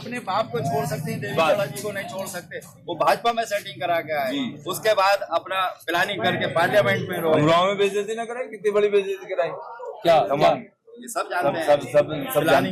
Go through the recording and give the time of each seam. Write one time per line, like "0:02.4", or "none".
none

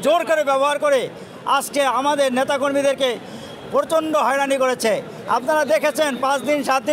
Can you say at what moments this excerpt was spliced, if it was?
none

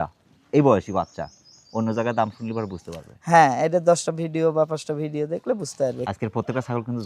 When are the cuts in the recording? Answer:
0:06.1

